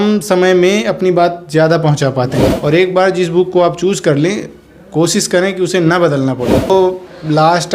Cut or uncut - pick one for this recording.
cut